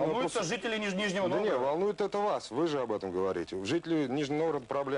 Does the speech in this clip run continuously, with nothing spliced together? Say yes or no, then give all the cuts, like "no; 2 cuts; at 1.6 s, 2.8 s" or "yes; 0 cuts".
no; 1 cut; at 1.4 s